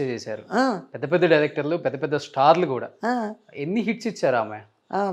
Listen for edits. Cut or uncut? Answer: uncut